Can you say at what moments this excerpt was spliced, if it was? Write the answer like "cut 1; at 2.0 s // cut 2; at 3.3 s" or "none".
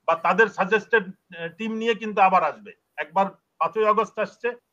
none